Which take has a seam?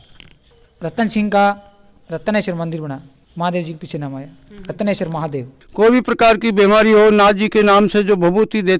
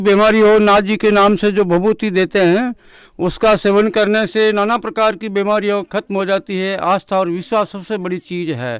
first; 1 cut; at 5.6 s

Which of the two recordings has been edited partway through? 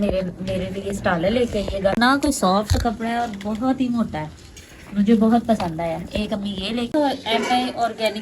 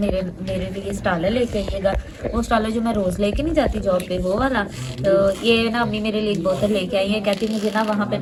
first; 2 cuts; at 2.0 s, 6.9 s

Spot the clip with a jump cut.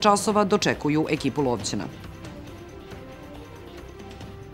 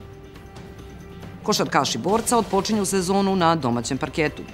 second; 1 cut; at 1.0 s

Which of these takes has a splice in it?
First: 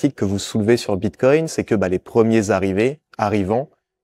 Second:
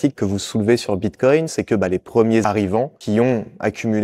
second; 1 cut; at 2.5 s

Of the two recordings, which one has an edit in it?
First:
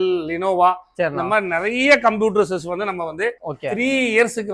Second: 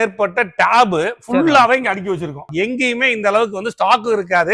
second; 1 cut; at 2.4 s

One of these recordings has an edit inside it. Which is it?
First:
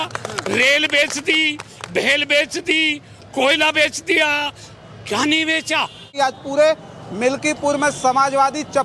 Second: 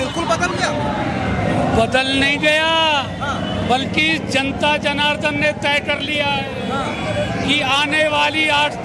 first; 1 cut; at 6.1 s

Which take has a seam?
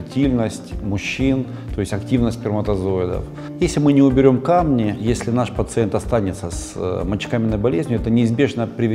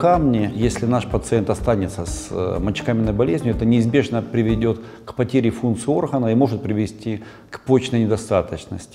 first; 1 cut; at 3.4 s

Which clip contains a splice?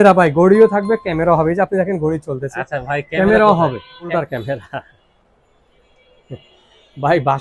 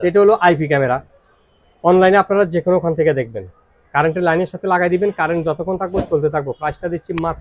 first; 1 cut; at 4.1 s

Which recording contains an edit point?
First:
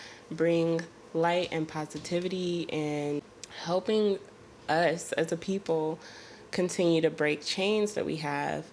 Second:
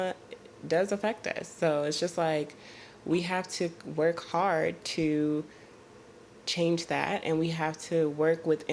first; 1 cut; at 3.2 s

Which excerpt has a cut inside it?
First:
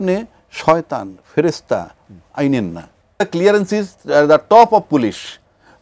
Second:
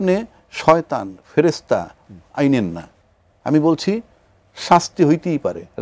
first; 1 cut; at 3.2 s

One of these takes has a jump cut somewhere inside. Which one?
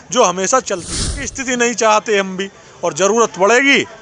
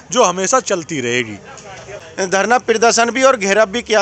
first; 1 cut; at 1.3 s

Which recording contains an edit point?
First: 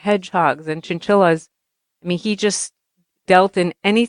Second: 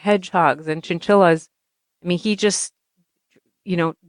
first; 1 cut; at 3.2 s

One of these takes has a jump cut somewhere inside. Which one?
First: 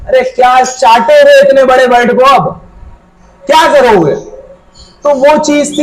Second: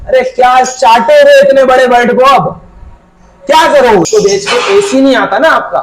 second; 1 cut; at 4.1 s

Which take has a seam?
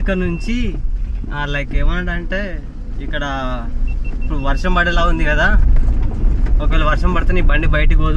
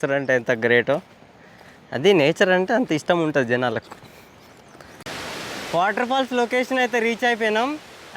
second; 1 cut; at 5.0 s

